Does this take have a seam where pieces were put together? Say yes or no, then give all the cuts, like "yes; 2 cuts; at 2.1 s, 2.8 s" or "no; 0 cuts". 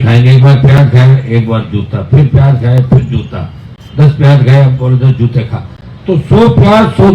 no; 0 cuts